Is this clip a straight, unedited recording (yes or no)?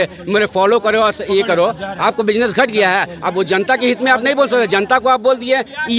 yes